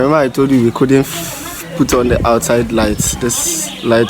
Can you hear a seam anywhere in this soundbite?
no; 0 cuts

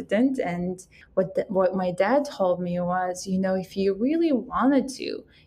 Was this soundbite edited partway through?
yes; 1 cut; at 0.9 s

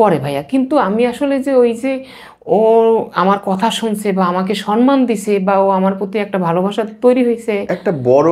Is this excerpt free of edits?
yes; 0 cuts

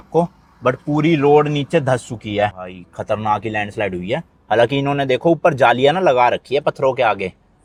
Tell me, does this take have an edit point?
no; 0 cuts

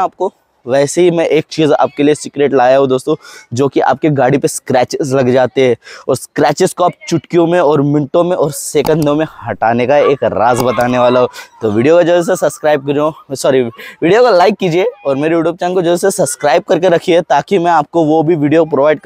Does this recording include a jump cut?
no; 0 cuts

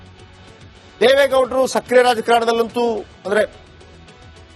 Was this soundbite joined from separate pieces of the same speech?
no; 0 cuts

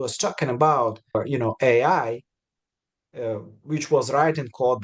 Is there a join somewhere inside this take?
yes; 1 cut; at 1.2 s

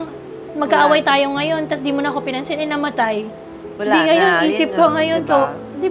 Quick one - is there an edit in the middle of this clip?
no; 0 cuts

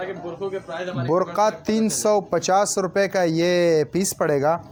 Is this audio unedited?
yes; 0 cuts

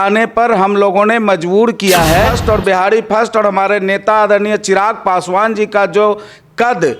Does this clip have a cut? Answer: yes; 1 cut; at 2.4 s

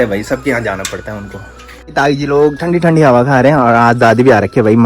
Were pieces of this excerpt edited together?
yes; 1 cut; at 1.9 s

